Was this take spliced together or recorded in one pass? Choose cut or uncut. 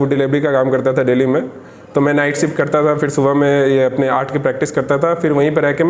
uncut